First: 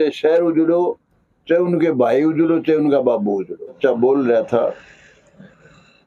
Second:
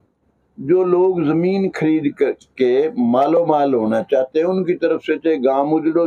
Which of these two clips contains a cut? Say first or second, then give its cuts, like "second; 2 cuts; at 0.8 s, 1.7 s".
first; 1 cut; at 3.8 s